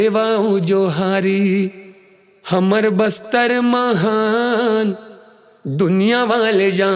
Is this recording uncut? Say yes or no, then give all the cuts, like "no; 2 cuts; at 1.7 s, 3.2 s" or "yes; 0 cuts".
yes; 0 cuts